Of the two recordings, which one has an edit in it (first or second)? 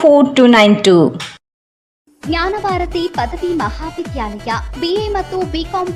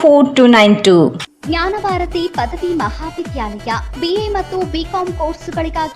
second